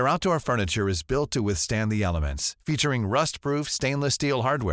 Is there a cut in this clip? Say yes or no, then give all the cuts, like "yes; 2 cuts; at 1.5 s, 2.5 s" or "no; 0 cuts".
no; 0 cuts